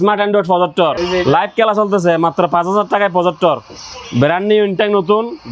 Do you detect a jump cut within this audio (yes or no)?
yes